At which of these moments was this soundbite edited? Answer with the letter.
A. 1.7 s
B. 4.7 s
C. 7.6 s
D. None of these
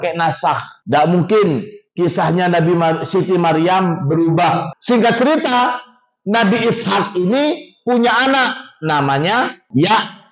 B